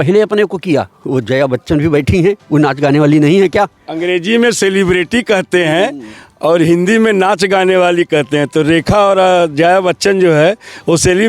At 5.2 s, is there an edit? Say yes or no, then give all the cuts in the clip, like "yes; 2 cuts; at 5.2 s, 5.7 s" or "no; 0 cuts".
no; 2 cuts; at 1.0 s, 3.9 s